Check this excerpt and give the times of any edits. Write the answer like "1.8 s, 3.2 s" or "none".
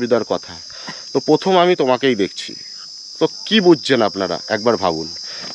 none